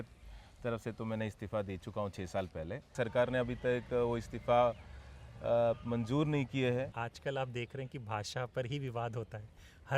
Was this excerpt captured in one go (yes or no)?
no